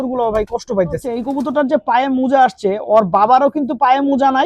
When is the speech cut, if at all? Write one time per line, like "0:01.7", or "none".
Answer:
0:01.2